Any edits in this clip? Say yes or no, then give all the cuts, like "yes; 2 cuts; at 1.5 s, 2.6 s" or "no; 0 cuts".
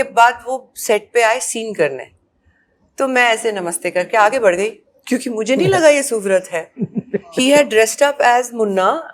no; 0 cuts